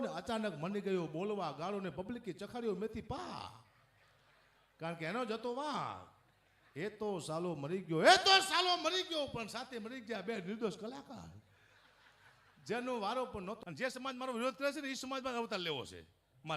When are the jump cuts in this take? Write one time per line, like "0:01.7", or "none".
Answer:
0:13.6